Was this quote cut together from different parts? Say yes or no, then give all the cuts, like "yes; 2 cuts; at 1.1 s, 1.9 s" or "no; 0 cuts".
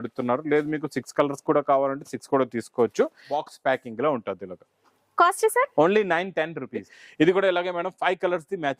yes; 2 cuts; at 3.3 s, 7.0 s